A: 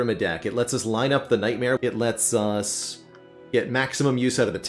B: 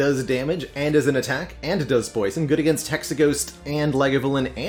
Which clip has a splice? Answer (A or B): A